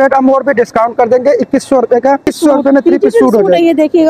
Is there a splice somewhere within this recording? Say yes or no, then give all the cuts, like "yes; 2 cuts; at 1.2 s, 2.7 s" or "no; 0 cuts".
yes; 1 cut; at 2.3 s